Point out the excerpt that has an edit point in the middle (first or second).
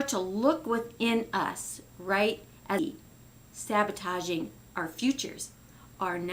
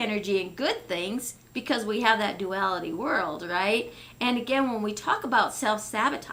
first